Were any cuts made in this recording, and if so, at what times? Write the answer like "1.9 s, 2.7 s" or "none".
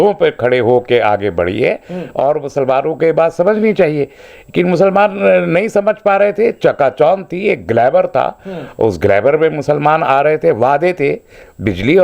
none